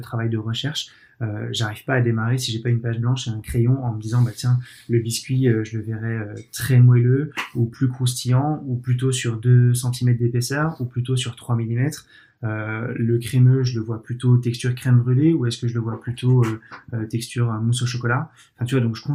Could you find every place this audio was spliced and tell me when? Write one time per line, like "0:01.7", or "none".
none